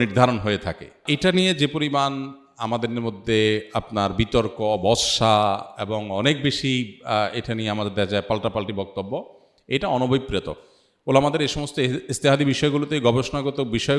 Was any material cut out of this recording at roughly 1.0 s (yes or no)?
yes